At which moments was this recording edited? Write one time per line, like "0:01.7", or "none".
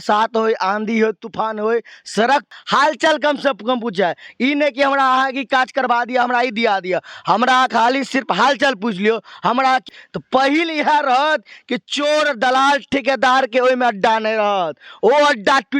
0:02.5
0:09.9

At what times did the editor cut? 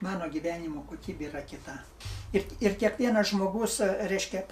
0:02.0

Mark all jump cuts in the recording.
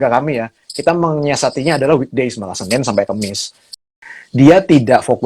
0:03.9

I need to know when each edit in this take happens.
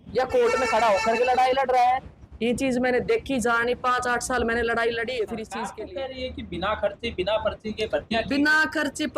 0:05.6

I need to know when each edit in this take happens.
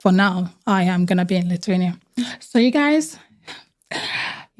none

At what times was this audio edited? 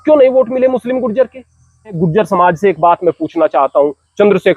0:02.0

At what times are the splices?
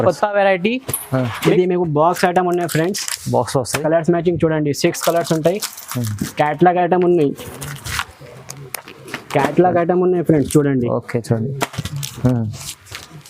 0:01.4

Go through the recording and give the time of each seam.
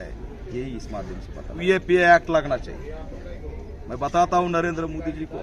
0:01.6

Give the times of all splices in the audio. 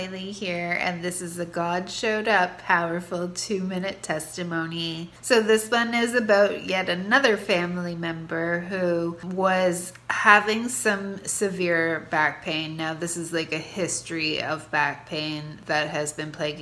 0:05.1
0:09.2

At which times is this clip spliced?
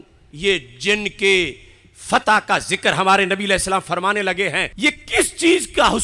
0:04.7

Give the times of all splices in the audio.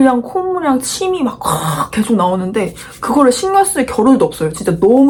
none

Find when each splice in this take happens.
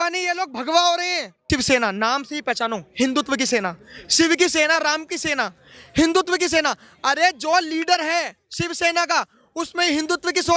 0:01.5

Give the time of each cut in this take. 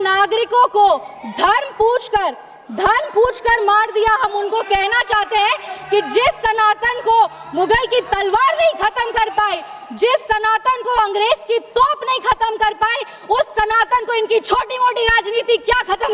none

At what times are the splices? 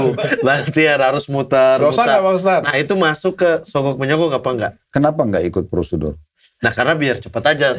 0:04.9

